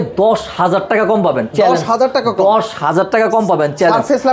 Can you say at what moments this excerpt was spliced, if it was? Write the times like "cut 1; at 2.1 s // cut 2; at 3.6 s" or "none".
none

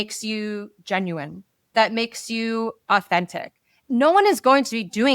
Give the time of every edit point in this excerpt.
cut 1; at 3.7 s

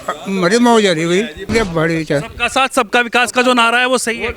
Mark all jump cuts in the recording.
cut 1; at 1.5 s

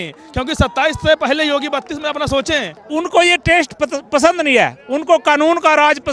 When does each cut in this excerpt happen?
cut 1; at 2.8 s

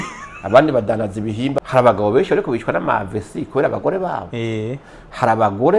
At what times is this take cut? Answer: cut 1; at 1.6 s

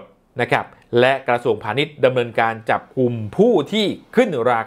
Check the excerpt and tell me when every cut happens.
none

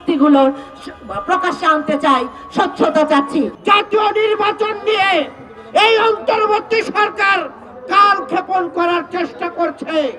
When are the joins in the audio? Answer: cut 1; at 3.6 s

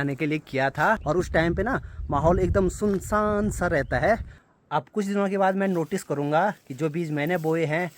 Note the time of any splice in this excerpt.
cut 1; at 1.0 s // cut 2; at 4.4 s

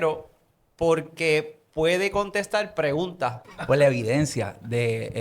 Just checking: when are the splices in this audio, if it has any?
cut 1; at 3.5 s

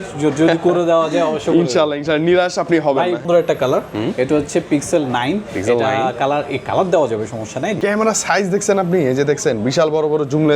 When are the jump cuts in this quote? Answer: cut 1; at 3.2 s // cut 2; at 7.8 s

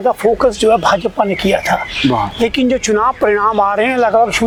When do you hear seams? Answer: none

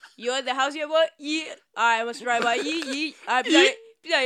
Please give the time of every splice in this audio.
none

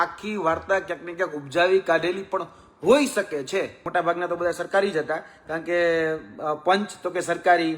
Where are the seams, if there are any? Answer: cut 1; at 3.8 s

